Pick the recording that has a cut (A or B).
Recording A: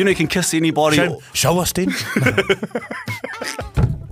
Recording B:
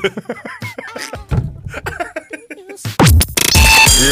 B